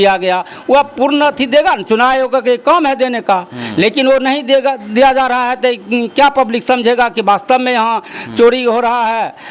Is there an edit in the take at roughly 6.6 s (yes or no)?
no